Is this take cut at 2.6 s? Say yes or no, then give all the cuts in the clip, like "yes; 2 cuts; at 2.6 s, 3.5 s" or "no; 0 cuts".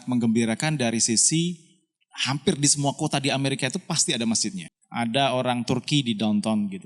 no; 1 cut; at 4.6 s